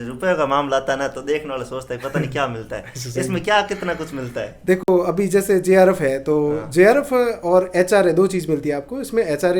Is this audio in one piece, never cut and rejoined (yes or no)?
yes